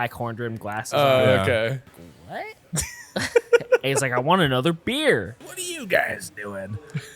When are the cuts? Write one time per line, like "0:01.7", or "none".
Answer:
0:02.0
0:05.5